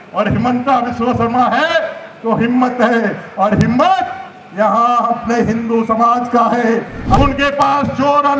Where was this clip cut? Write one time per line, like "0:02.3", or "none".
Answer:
0:07.2